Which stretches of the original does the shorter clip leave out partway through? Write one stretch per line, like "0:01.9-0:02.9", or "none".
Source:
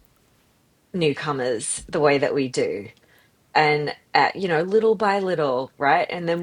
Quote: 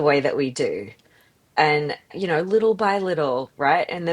0:04.1-0:04.3